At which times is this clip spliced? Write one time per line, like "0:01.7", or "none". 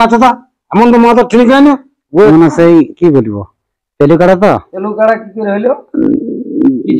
0:02.1
0:04.8